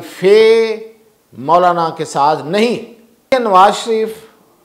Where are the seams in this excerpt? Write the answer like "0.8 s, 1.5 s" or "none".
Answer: 3.3 s